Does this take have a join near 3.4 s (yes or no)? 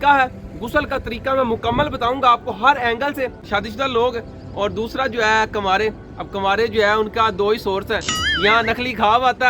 yes